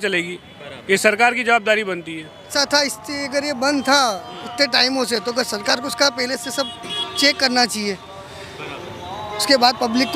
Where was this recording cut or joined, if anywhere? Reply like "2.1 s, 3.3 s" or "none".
2.5 s